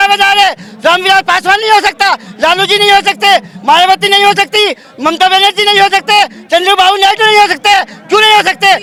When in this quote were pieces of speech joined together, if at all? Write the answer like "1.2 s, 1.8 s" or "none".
none